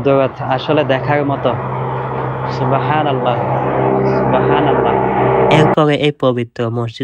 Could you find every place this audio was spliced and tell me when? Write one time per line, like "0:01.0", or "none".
0:05.7